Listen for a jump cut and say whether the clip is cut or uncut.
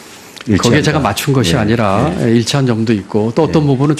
cut